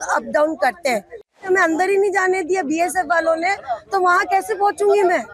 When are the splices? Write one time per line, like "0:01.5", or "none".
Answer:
0:01.5